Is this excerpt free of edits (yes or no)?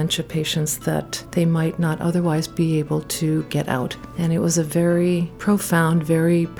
no